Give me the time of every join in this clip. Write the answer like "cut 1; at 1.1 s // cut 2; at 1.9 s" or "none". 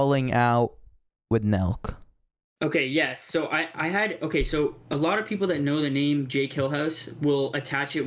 none